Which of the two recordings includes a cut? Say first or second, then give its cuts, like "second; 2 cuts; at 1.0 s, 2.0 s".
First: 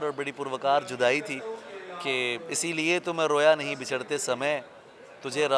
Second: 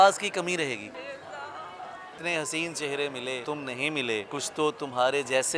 second; 4 cuts; at 0.9 s, 2.2 s, 3.4 s, 4.3 s